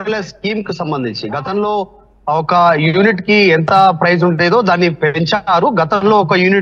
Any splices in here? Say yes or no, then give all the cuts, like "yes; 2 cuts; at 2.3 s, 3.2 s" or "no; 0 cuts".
no; 0 cuts